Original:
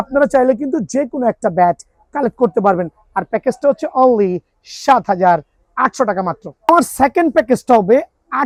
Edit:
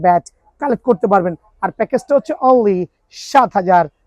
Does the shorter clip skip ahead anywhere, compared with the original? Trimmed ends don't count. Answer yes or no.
no